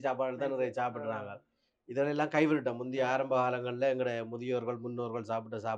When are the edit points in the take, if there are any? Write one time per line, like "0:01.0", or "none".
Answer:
none